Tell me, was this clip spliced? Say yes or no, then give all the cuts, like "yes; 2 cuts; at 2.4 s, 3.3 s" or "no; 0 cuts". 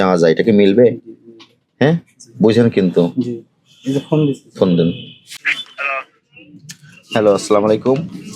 no; 0 cuts